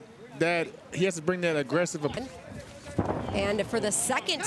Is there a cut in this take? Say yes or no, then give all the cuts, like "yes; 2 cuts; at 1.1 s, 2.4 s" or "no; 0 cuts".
yes; 1 cut; at 2.1 s